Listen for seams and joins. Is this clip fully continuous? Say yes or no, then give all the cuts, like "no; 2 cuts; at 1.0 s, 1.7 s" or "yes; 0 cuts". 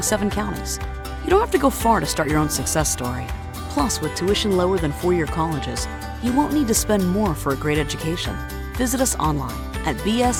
yes; 0 cuts